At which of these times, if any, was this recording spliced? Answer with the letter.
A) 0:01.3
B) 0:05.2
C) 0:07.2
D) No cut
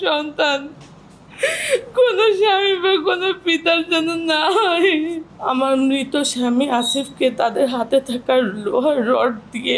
B